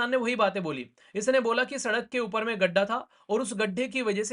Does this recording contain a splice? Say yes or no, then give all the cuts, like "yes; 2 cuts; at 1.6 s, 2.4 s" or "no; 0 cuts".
no; 0 cuts